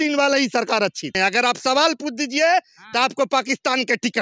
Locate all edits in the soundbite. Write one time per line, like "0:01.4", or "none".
0:01.2

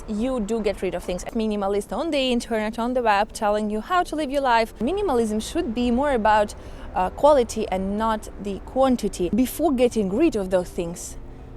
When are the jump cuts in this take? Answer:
0:01.3
0:04.8
0:09.3

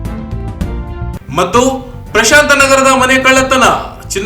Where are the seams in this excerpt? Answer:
0:01.1

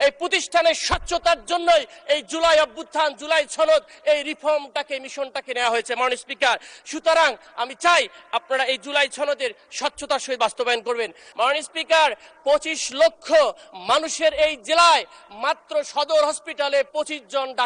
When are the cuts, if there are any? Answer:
0:11.2

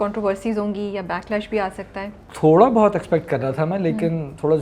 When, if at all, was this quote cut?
none

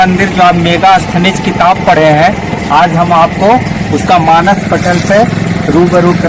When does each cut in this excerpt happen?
none

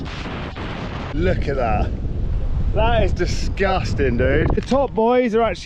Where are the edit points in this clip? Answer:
0:01.1
0:04.6

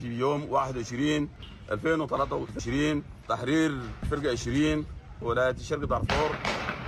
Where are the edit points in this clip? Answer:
none

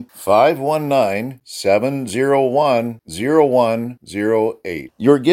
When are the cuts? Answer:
none

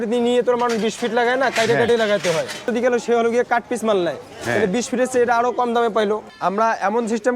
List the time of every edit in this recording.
0:02.7
0:06.3

